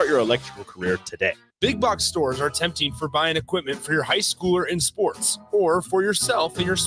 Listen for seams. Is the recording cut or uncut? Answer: cut